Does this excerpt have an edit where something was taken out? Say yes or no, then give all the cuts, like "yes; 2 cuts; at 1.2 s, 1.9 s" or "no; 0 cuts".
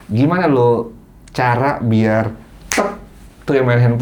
no; 0 cuts